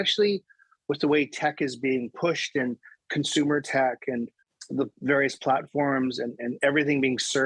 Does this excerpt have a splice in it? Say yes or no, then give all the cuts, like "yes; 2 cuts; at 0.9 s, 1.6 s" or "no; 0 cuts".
no; 0 cuts